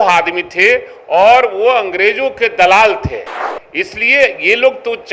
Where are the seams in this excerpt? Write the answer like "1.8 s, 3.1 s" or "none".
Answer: none

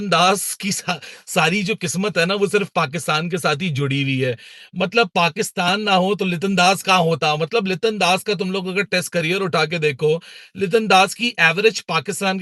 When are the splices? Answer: none

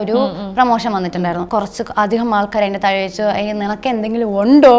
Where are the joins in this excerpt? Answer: 1.4 s

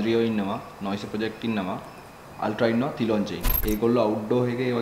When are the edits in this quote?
3.5 s

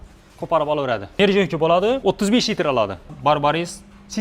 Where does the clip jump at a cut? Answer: 1.1 s, 2.0 s, 3.1 s

